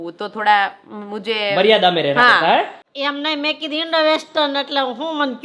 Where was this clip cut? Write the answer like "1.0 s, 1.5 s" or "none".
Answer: 2.8 s